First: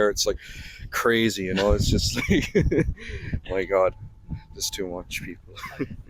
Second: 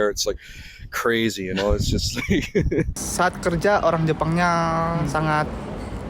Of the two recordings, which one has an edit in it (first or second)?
second